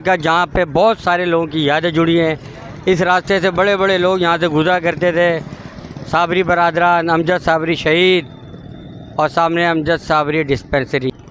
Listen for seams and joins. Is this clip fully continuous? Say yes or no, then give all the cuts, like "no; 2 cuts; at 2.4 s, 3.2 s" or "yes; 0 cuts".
yes; 0 cuts